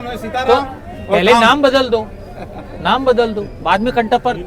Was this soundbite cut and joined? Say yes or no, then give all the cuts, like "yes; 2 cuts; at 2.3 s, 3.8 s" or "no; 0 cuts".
no; 0 cuts